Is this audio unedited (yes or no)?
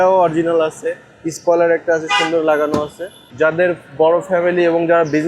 no